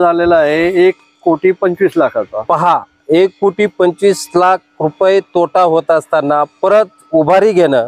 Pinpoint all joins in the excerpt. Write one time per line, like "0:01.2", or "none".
none